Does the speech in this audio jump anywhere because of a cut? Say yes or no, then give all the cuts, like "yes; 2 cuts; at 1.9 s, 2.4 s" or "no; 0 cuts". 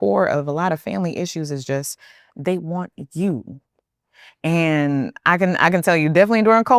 no; 0 cuts